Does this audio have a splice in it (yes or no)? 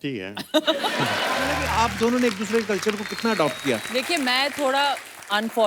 yes